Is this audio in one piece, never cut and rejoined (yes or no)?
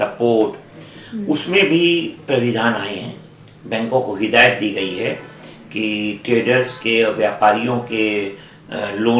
yes